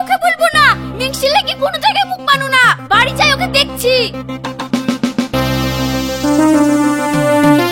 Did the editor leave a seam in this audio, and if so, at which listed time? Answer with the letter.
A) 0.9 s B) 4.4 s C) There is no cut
C